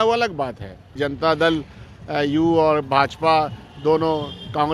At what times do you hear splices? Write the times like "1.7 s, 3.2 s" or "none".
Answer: 1.0 s

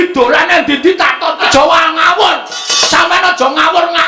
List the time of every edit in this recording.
1.4 s

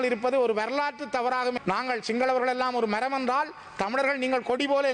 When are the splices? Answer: 1.6 s

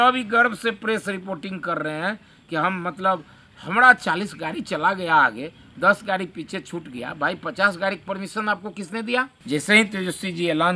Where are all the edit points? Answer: 9.4 s

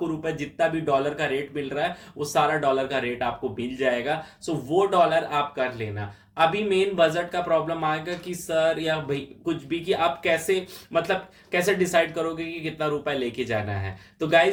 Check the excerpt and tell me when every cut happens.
none

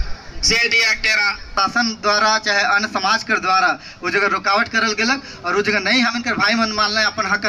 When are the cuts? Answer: 1.5 s

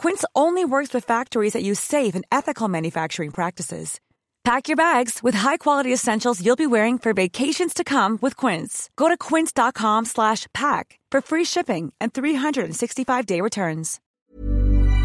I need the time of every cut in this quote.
14.0 s

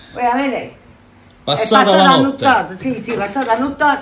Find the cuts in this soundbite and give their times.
none

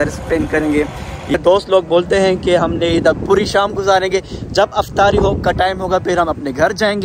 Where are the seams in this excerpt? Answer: 1.3 s

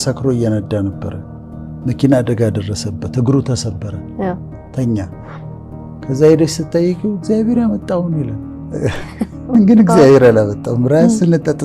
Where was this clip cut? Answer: 9.5 s

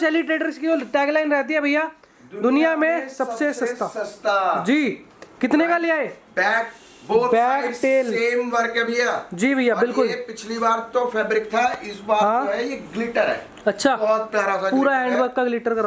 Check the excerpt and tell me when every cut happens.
none

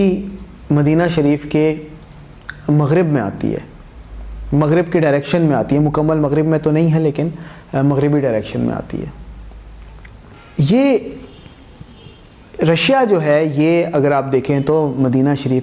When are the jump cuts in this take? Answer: 10.3 s

